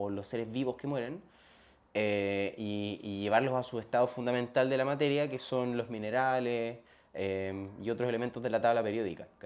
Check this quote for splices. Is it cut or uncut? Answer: uncut